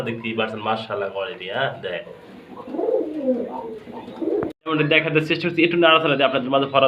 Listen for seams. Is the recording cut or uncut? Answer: cut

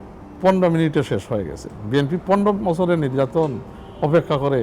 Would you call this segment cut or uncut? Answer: uncut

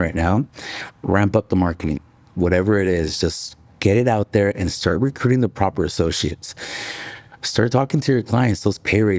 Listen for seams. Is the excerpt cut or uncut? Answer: uncut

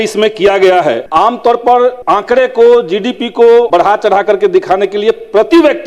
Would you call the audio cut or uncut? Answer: cut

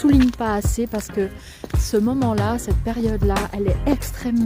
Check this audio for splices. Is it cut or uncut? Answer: uncut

